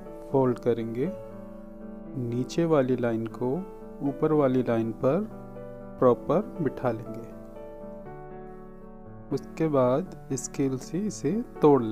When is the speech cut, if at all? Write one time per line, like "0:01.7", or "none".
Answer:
0:07.5
0:09.3